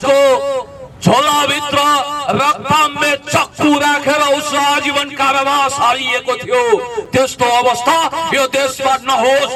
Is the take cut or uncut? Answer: uncut